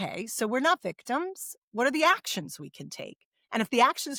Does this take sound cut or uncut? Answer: uncut